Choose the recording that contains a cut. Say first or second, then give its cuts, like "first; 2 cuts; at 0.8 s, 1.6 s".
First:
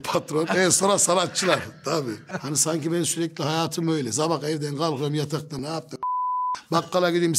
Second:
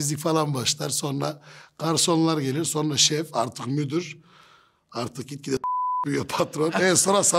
first; 2 cuts; at 2.3 s, 5.6 s